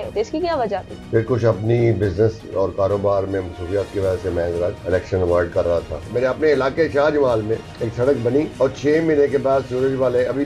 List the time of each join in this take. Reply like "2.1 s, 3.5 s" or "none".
0.9 s, 4.8 s, 6.1 s, 7.8 s, 8.5 s